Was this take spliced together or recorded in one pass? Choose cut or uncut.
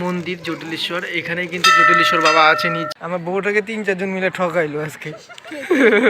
cut